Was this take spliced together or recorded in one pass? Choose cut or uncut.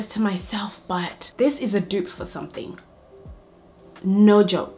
cut